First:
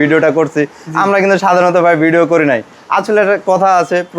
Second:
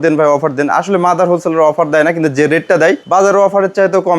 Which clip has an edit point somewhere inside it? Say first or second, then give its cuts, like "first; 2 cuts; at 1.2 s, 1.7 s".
second; 1 cut; at 3.0 s